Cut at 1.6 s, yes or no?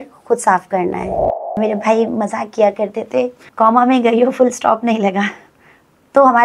yes